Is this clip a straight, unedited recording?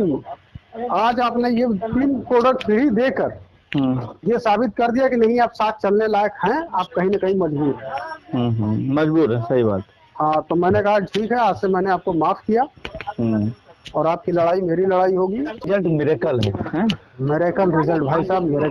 no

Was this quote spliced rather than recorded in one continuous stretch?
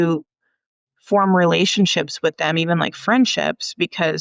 no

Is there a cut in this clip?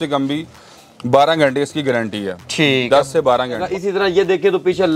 yes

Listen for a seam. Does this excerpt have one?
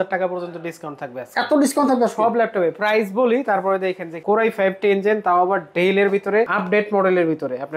yes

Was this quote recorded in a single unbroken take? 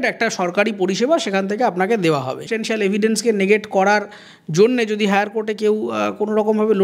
no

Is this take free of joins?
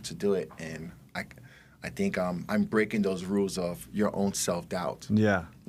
yes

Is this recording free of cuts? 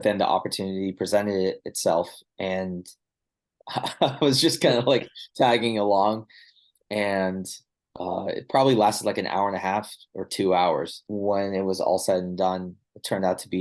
no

